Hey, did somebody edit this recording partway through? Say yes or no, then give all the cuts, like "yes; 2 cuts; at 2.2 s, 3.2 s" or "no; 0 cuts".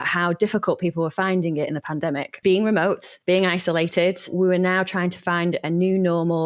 yes; 3 cuts; at 2.4 s, 3.1 s, 4.3 s